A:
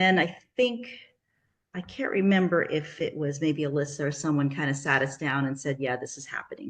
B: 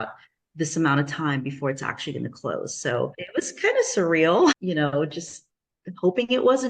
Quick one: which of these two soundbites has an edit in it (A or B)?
B